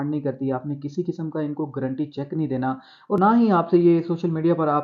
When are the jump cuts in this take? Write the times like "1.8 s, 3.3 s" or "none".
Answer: 3.2 s